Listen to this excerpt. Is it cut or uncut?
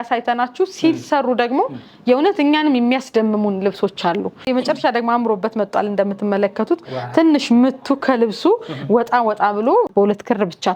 cut